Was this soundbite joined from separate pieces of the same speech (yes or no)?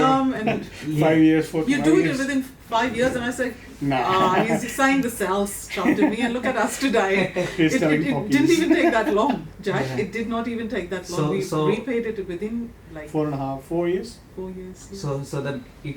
no